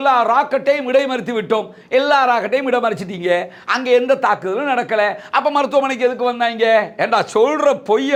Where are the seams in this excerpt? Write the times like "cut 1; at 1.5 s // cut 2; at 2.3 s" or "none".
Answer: none